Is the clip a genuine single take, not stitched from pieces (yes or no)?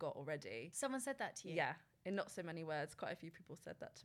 yes